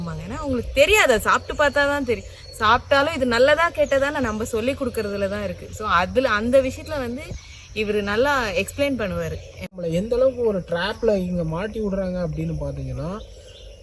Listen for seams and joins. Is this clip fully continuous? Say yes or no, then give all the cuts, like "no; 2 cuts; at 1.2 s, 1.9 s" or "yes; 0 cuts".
no; 1 cut; at 9.7 s